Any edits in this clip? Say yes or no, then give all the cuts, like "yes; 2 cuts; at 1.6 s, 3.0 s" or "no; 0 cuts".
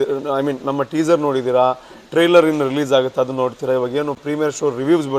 no; 0 cuts